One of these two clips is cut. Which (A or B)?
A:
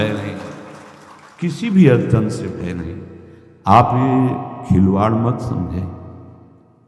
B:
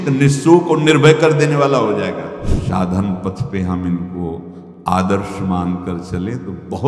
B